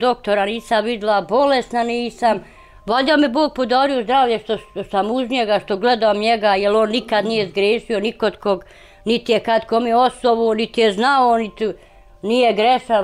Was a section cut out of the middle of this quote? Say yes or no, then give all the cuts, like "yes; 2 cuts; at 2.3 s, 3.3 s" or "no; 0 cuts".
no; 0 cuts